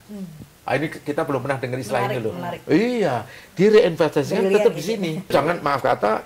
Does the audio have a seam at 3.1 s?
no; 1 cut; at 5.3 s

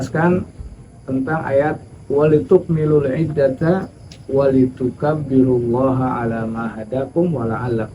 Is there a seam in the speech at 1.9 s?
yes; 1 cut; at 1.9 s

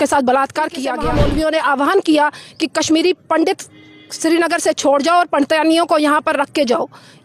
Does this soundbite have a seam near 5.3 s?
no; 1 cut; at 1.0 s

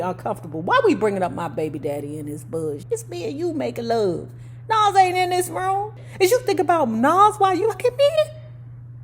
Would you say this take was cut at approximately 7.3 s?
no; 2 cuts; at 2.8 s, 6.0 s

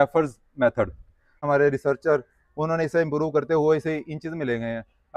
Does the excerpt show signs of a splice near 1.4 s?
yes; 1 cut; at 1.4 s

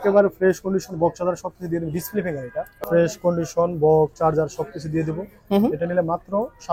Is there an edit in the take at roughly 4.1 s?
no; 1 cut; at 2.8 s

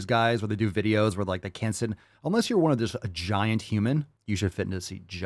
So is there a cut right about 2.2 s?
no; 1 cut; at 4.1 s

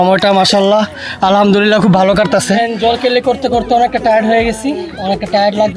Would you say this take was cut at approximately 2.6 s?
yes; 1 cut; at 2.6 s

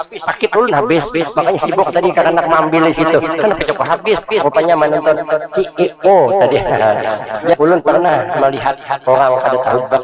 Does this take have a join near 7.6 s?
yes; 1 cut; at 7.6 s

